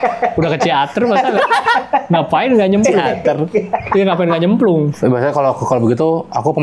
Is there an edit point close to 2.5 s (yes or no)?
no